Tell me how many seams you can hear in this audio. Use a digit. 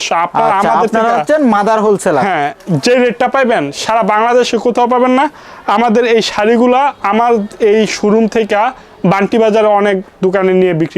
0